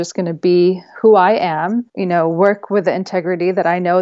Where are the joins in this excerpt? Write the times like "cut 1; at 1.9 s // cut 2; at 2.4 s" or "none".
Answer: cut 1; at 1.9 s